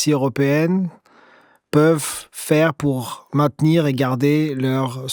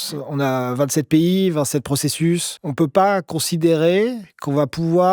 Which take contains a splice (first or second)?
second